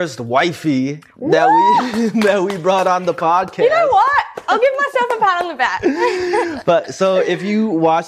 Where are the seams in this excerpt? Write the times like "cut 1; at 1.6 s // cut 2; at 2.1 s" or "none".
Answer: none